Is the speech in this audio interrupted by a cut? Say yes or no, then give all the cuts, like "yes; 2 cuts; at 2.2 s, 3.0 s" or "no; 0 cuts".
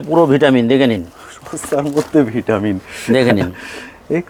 no; 0 cuts